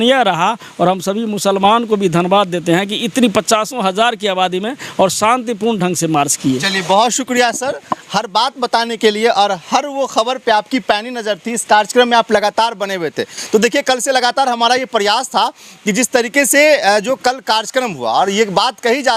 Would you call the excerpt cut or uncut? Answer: uncut